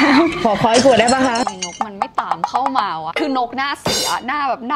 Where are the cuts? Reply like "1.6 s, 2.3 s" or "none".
1.4 s